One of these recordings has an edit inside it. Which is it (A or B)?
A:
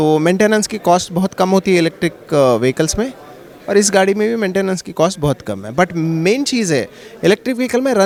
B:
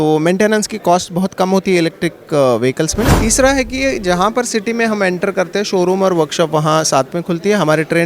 B